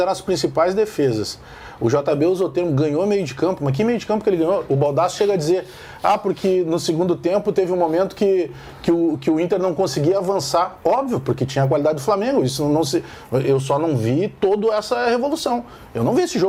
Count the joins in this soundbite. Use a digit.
0